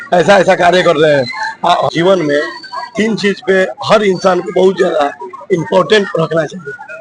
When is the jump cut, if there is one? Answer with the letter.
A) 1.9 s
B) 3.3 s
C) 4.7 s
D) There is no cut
A